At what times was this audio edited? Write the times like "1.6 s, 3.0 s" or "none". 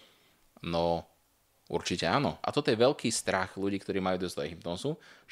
2.4 s